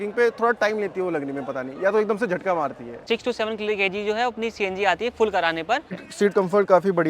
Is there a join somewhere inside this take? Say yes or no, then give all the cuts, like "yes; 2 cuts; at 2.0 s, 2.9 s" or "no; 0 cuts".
yes; 2 cuts; at 3.0 s, 6.0 s